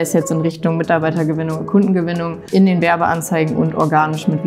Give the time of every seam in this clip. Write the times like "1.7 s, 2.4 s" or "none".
2.5 s